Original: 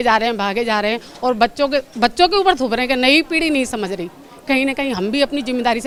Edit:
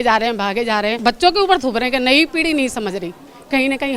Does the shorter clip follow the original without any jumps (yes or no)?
no